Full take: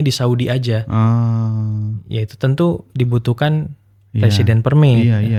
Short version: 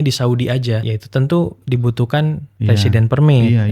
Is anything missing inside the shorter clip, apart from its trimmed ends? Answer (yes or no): yes